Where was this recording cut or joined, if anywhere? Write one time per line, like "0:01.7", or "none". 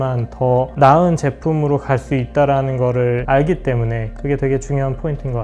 0:04.2